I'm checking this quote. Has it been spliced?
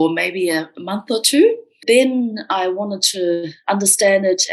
yes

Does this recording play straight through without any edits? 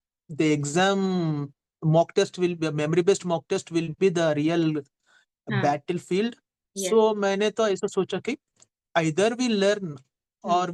yes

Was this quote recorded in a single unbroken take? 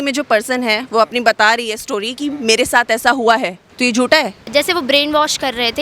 no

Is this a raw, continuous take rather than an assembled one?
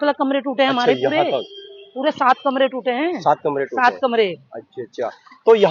yes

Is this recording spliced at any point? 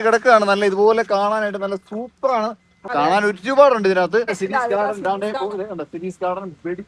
yes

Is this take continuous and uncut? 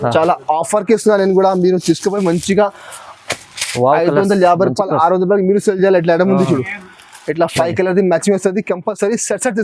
yes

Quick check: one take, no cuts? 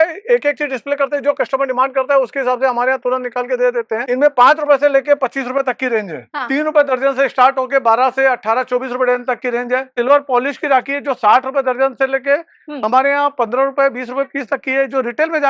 no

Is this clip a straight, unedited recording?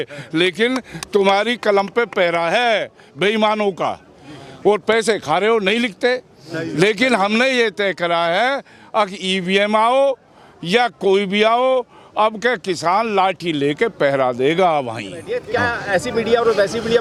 yes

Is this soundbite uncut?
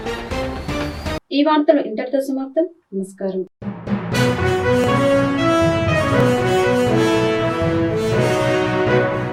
yes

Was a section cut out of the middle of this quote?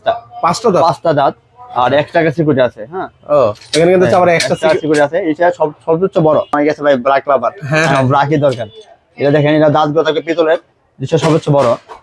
yes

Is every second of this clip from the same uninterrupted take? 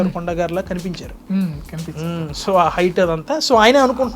yes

